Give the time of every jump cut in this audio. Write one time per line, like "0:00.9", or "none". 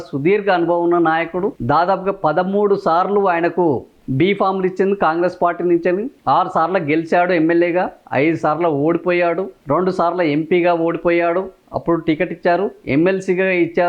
0:01.6

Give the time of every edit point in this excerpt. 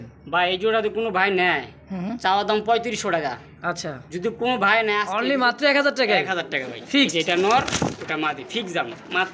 0:04.9

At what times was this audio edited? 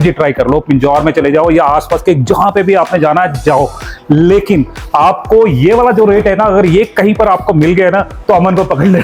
none

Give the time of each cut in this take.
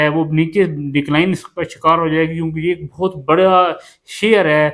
none

